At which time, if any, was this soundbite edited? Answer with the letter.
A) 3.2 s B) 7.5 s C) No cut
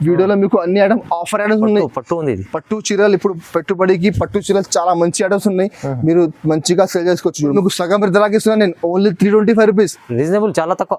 B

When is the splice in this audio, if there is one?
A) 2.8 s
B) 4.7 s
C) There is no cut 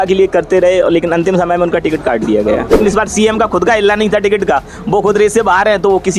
A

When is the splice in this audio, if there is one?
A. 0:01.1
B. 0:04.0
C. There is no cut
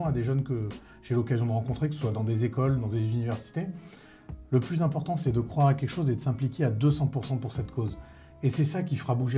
C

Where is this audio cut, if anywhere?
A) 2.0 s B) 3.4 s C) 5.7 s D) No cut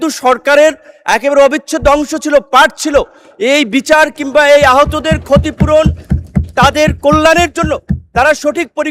D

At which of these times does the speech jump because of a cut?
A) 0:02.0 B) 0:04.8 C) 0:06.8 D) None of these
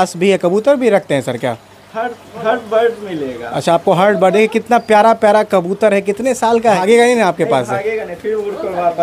C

